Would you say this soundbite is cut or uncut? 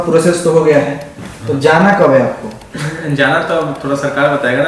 uncut